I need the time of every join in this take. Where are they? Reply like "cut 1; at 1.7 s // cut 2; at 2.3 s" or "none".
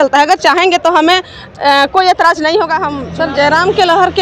cut 1; at 3.0 s

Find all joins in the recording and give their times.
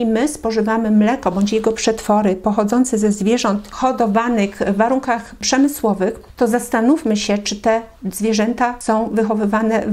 cut 1; at 3.7 s // cut 2; at 6.2 s // cut 3; at 8.8 s

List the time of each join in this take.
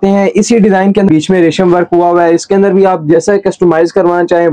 cut 1; at 1.1 s

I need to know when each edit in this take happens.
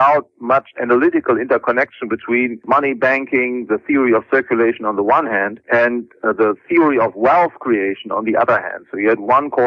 cut 1; at 3.7 s

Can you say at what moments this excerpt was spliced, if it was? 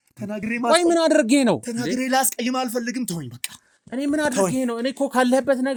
none

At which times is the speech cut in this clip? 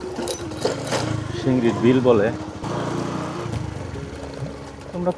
cut 1; at 2.6 s

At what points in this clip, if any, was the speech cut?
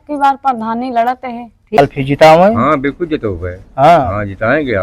cut 1; at 1.8 s

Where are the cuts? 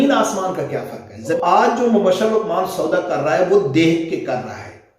cut 1; at 1.4 s

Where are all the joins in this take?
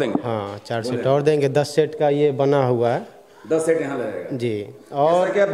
none

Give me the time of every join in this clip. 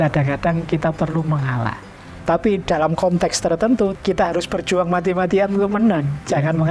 cut 1; at 2.1 s // cut 2; at 3.9 s

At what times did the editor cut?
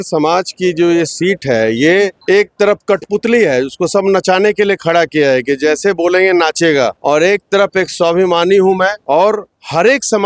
cut 1; at 2.2 s // cut 2; at 7.0 s // cut 3; at 9.0 s

